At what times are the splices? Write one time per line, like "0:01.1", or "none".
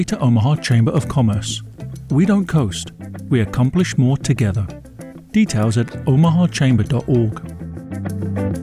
0:07.4